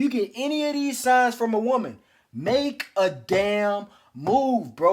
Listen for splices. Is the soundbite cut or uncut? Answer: uncut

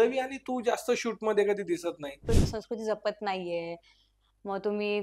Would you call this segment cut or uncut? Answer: cut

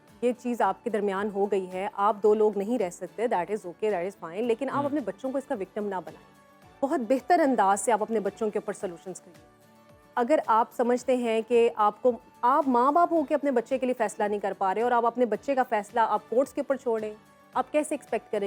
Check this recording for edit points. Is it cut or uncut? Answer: uncut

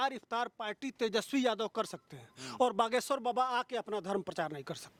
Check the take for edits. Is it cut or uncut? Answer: uncut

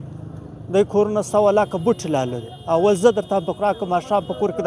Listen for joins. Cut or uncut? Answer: uncut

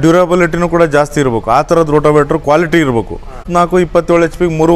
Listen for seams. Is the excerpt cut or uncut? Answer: cut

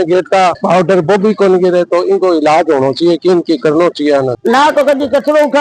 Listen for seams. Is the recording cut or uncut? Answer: cut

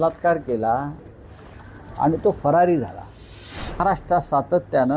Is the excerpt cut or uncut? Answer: cut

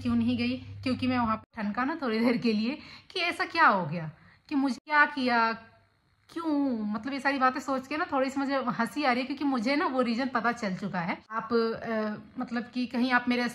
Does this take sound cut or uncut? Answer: cut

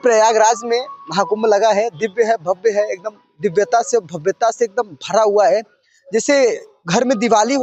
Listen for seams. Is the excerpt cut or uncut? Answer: uncut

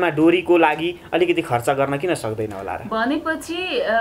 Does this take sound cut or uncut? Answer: uncut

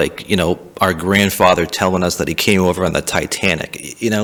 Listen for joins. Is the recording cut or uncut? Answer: uncut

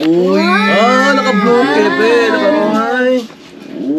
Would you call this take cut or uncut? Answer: uncut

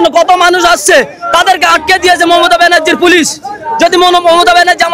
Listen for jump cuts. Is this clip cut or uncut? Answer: uncut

